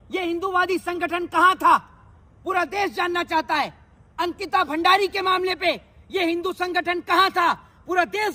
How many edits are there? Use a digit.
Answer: 0